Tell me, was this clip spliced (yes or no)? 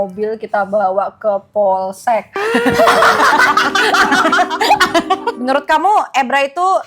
yes